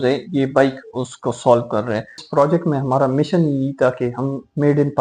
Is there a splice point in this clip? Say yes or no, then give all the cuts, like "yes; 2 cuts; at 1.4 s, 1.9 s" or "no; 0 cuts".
yes; 1 cut; at 2.2 s